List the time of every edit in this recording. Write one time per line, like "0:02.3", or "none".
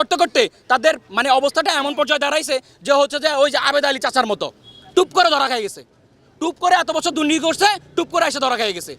none